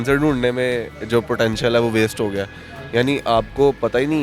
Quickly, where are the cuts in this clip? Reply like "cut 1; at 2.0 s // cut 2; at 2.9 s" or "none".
none